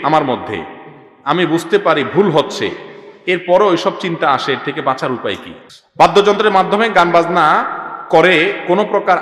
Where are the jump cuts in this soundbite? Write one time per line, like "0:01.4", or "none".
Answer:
0:05.5

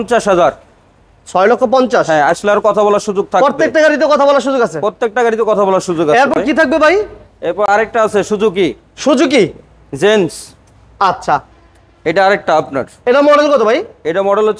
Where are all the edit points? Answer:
none

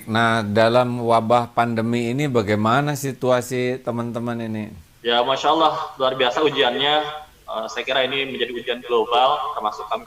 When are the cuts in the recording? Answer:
0:04.8

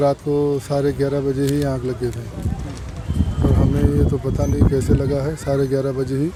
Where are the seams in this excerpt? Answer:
none

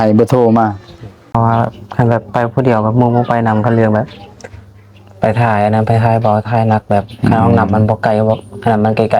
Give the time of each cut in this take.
0:01.3

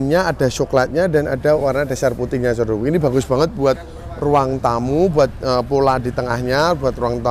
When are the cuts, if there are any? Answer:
none

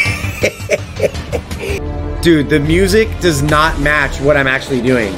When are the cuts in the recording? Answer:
0:01.8

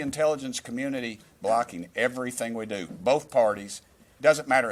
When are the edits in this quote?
none

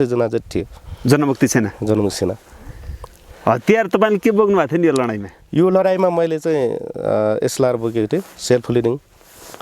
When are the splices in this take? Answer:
none

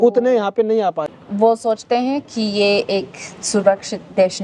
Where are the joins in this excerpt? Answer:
0:01.1

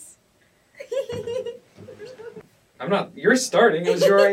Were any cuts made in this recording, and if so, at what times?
0:02.4

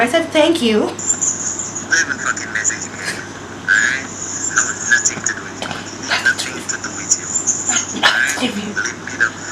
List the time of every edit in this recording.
0:01.1

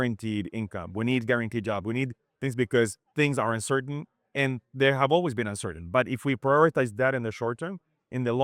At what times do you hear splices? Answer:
none

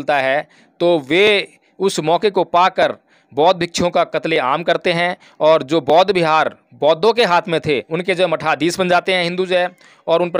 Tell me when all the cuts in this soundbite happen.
0:07.9

